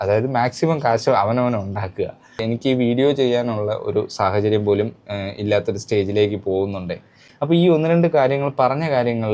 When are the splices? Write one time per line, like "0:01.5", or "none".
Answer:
0:02.3
0:07.3